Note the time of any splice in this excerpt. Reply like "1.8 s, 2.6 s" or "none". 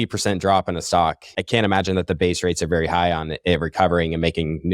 1.3 s